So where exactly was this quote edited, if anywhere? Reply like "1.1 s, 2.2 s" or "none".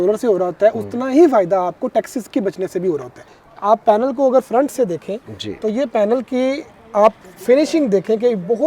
3.4 s